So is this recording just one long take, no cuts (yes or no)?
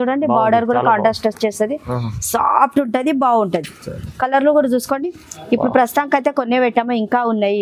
yes